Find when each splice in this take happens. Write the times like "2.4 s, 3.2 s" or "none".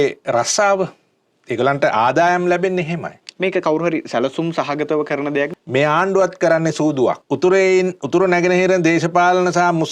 5.5 s, 7.2 s